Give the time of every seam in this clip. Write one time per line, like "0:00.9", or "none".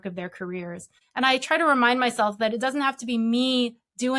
0:00.9